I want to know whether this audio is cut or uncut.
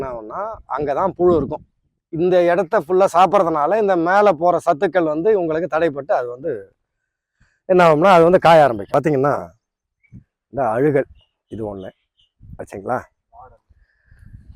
cut